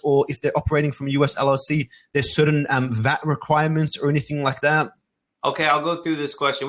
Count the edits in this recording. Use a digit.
0